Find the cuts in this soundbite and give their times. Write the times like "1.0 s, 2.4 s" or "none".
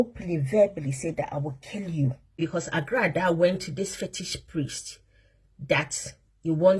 2.4 s